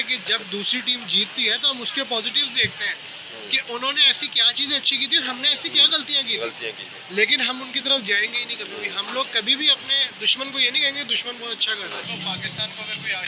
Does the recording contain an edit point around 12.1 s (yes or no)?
yes